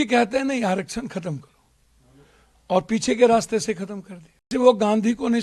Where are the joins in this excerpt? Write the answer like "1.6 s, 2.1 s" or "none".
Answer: 4.5 s